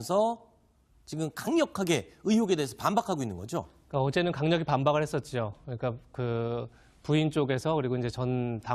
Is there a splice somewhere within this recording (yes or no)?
yes